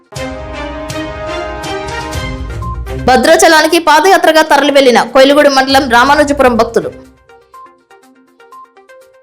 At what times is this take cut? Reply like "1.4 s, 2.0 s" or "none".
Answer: 1.4 s